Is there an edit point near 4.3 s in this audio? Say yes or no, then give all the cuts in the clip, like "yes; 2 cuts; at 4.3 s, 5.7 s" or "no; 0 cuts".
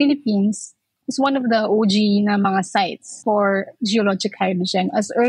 no; 1 cut; at 3.1 s